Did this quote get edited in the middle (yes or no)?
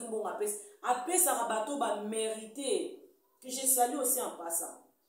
no